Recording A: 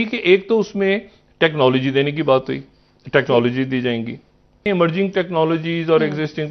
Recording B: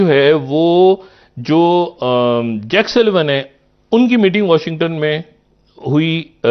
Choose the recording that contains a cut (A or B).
A